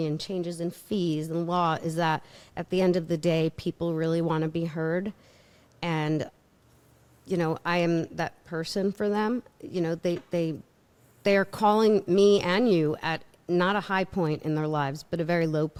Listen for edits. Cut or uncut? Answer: uncut